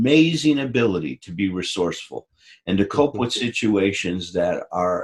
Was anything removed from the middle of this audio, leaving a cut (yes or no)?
no